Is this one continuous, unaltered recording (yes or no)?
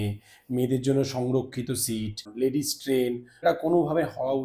no